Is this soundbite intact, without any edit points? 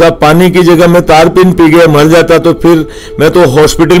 yes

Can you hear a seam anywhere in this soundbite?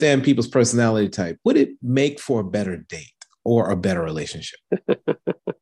no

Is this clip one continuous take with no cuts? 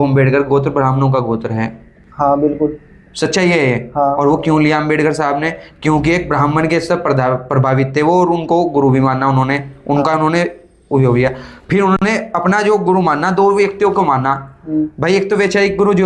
yes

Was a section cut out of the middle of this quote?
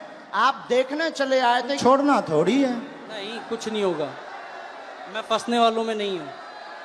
yes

